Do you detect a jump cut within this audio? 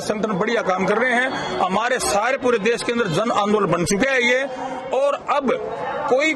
no; 0 cuts

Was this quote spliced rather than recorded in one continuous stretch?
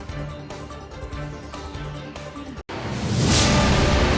no; 0 cuts

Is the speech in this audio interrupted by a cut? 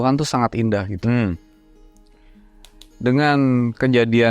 no; 0 cuts

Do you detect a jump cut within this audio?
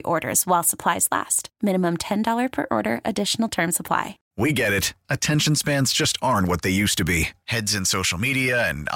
yes; 1 cut; at 4.2 s

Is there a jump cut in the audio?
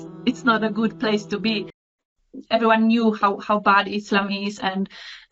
yes; 1 cut; at 1.8 s

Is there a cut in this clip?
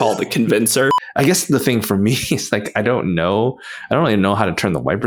yes; 1 cut; at 1.0 s

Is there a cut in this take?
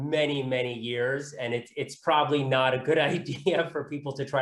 no; 0 cuts

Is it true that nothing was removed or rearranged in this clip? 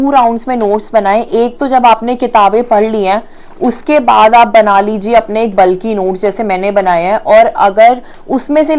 yes; 0 cuts

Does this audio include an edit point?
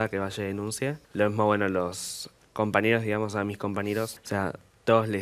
yes; 2 cuts; at 1.0 s, 4.2 s

